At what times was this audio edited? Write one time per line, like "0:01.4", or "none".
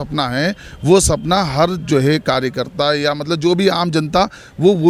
none